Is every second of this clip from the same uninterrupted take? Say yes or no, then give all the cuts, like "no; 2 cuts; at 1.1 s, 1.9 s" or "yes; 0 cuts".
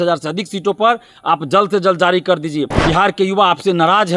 no; 1 cut; at 2.8 s